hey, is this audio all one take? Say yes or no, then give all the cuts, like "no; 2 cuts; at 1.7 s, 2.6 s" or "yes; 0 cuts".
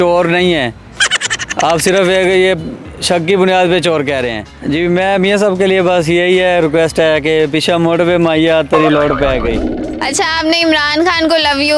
no; 2 cuts; at 4.5 s, 9.7 s